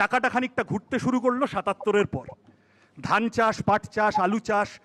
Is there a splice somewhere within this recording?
no; 0 cuts

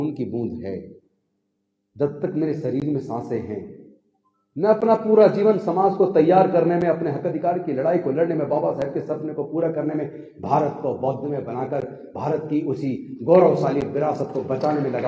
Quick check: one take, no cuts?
yes; 0 cuts

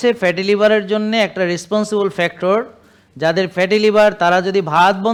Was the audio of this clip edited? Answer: no; 0 cuts

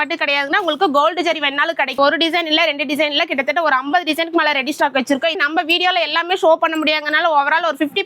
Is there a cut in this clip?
yes; 2 cuts; at 2.0 s, 5.4 s

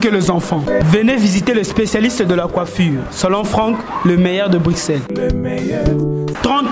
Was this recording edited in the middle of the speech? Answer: no; 0 cuts

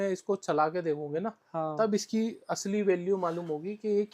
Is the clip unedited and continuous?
yes; 0 cuts

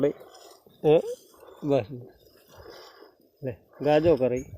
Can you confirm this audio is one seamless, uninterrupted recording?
yes; 0 cuts

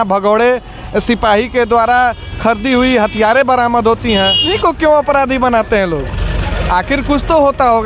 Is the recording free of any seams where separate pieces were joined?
no; 1 cut; at 4.5 s

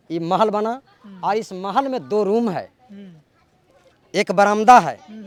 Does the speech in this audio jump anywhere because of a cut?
no; 0 cuts

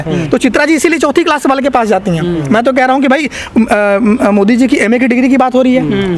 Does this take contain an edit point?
no; 0 cuts

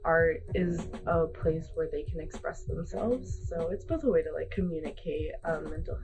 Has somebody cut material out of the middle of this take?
yes; 1 cut; at 3.4 s

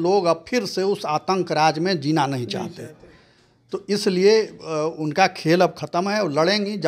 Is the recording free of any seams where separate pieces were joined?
yes; 0 cuts

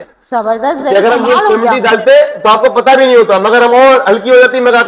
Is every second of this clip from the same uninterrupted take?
yes; 0 cuts

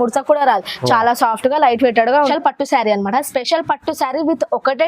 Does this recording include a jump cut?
yes; 1 cut; at 2.3 s

